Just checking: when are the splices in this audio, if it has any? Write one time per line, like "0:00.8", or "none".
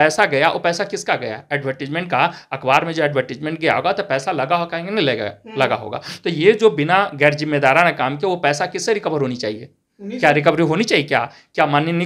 none